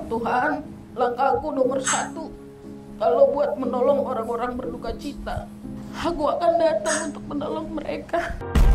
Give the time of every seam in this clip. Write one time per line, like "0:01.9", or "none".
0:06.0